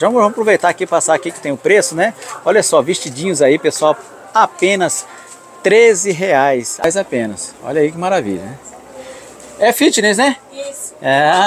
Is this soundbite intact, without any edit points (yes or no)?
no